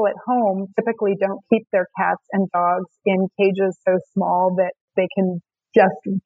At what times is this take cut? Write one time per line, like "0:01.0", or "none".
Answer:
0:04.8